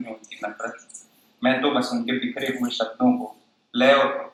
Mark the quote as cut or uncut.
uncut